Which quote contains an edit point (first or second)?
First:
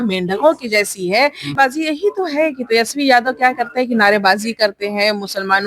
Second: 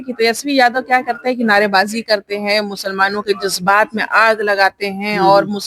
first